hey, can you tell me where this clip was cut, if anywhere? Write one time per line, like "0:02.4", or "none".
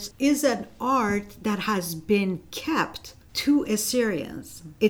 none